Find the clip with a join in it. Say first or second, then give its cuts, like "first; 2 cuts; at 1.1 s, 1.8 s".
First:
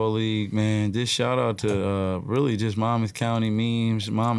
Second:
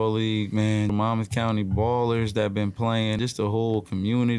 second; 2 cuts; at 0.9 s, 3.2 s